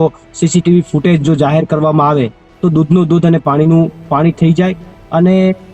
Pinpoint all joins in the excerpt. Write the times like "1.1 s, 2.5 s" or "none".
none